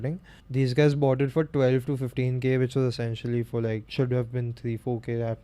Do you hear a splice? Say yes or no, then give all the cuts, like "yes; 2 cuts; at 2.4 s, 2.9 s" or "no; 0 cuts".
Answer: yes; 1 cut; at 3.9 s